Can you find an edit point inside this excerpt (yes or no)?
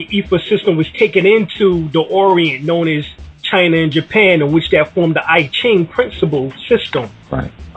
yes